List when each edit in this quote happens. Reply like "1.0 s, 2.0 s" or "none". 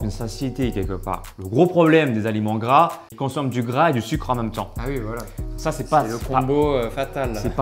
1.3 s, 3.1 s